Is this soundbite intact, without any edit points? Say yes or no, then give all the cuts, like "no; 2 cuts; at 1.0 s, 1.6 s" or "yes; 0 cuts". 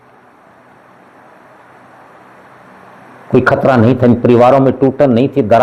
yes; 0 cuts